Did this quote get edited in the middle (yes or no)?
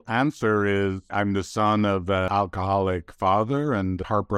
yes